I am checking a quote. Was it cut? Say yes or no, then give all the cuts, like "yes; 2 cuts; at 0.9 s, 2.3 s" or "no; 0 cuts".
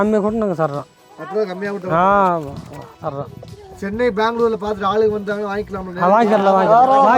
no; 0 cuts